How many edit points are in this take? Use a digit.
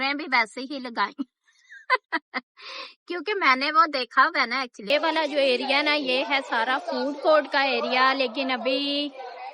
1